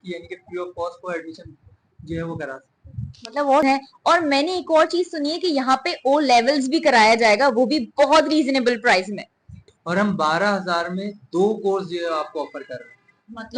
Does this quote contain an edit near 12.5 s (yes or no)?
no